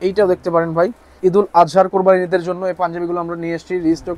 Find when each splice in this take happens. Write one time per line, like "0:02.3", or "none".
0:01.1